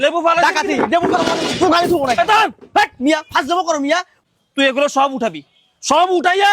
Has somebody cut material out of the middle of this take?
yes; 1 cut; at 4.1 s

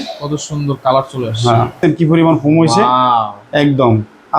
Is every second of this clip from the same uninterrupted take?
no; 1 cut; at 1.8 s

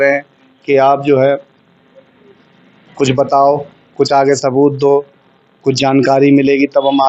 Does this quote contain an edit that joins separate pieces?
no; 0 cuts

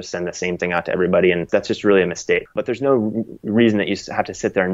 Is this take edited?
yes; 2 cuts; at 1.4 s, 2.5 s

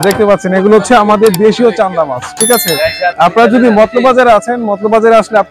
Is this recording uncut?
yes; 0 cuts

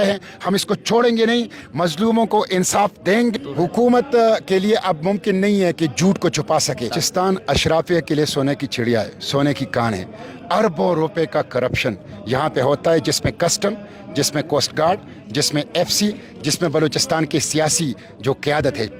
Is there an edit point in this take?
yes; 2 cuts; at 3.3 s, 7.0 s

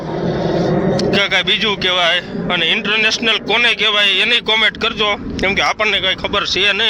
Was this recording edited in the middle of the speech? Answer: no; 0 cuts

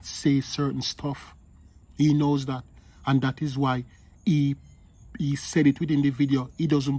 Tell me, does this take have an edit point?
no; 0 cuts

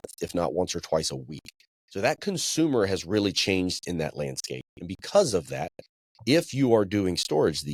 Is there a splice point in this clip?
no; 0 cuts

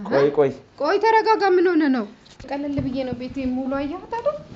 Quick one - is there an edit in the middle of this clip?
yes; 1 cut; at 2.5 s

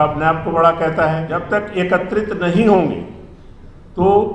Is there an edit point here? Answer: yes; 1 cut; at 1.3 s

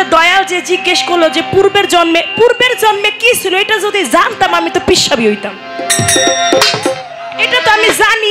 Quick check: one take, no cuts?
yes; 0 cuts

